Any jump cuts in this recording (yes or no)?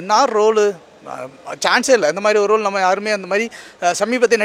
no